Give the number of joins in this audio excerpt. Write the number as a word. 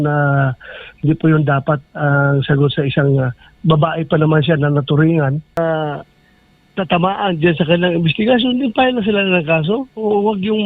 one